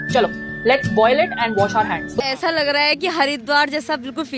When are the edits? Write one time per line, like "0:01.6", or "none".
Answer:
0:02.3